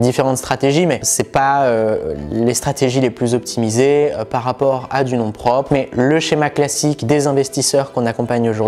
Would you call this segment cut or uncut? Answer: cut